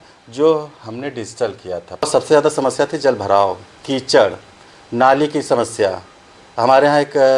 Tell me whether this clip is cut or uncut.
cut